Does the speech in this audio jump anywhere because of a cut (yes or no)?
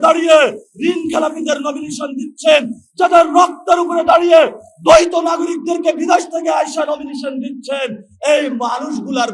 no